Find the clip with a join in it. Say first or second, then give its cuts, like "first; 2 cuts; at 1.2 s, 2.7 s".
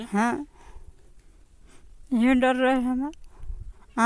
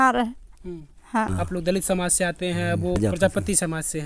second; 2 cuts; at 1.3 s, 3.0 s